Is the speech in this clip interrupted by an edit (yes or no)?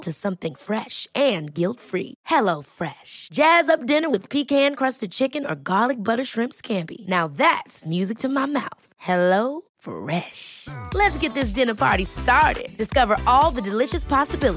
no